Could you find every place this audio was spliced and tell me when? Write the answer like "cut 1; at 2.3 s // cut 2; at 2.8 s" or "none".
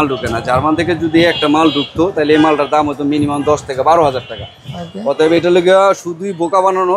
none